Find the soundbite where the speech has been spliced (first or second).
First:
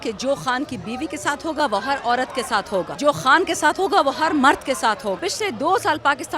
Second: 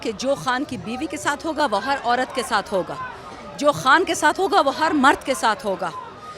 first